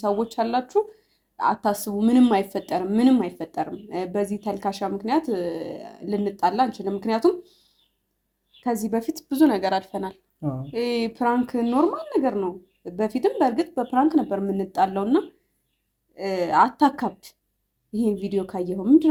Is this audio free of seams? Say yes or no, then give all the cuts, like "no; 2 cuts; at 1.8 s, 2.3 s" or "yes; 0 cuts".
yes; 0 cuts